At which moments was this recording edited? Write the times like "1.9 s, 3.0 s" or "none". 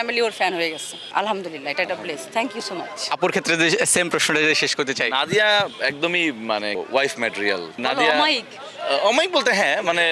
none